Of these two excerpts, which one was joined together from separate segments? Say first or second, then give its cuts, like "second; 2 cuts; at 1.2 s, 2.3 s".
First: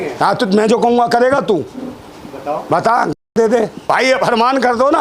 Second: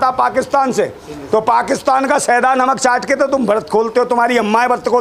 first; 1 cut; at 3.7 s